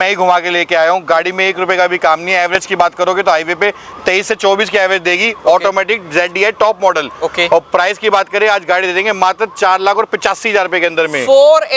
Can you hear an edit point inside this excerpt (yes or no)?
no